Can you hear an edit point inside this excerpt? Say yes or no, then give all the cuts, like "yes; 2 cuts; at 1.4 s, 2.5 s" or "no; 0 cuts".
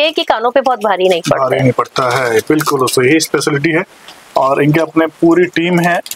no; 0 cuts